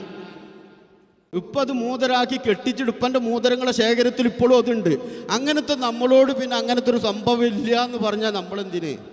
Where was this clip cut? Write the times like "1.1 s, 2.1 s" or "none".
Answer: 1.2 s